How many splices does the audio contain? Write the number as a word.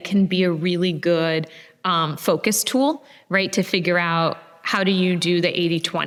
zero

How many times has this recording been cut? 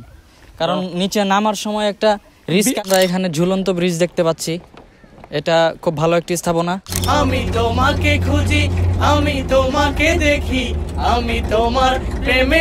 two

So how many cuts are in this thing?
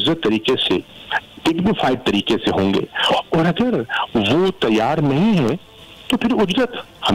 zero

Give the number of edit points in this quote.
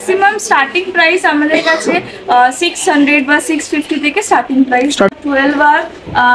one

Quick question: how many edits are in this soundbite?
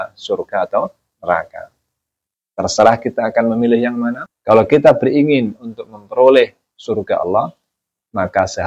one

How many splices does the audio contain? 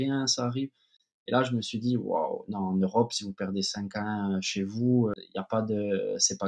one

